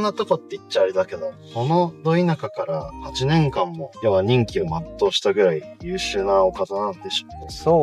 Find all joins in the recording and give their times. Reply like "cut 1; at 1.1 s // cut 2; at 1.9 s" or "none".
none